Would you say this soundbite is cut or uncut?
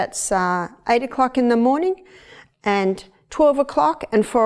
uncut